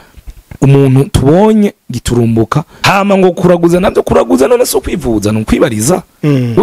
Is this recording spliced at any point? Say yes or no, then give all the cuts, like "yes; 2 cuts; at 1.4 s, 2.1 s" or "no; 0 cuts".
yes; 1 cut; at 2.7 s